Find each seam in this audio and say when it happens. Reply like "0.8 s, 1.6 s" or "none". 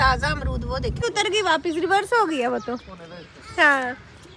1.0 s